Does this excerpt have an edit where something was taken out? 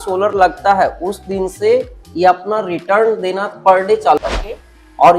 yes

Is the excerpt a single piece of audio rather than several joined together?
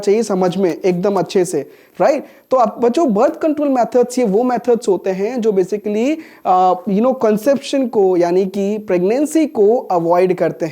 yes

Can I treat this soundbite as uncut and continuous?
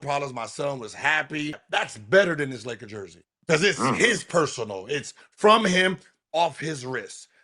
no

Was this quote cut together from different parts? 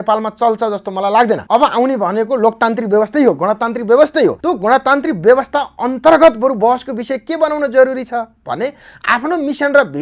yes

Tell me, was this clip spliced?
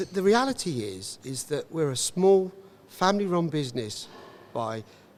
no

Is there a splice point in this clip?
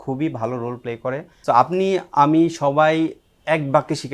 yes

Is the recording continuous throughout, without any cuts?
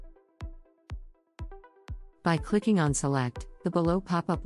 no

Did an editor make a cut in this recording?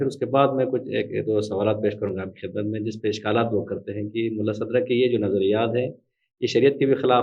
no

